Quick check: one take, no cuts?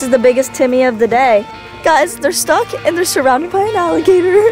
no; 1 cut; at 1.6 s

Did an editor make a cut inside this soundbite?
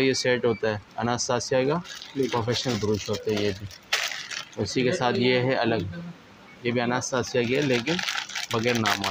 no; 0 cuts

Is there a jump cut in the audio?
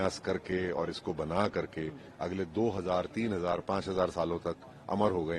no; 0 cuts

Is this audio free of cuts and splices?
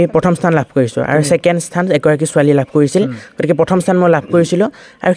yes; 0 cuts

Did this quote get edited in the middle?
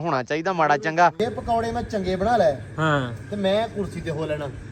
yes; 1 cut; at 1.2 s

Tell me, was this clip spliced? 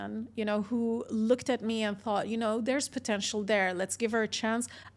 no; 0 cuts

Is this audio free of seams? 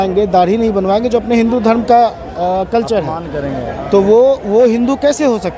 yes; 0 cuts

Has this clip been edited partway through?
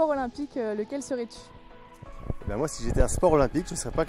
no; 0 cuts

